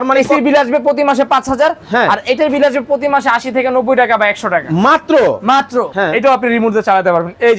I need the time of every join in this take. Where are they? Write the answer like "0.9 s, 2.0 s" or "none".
5.9 s